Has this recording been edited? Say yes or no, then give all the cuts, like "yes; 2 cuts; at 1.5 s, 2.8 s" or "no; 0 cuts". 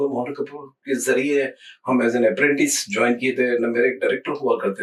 no; 0 cuts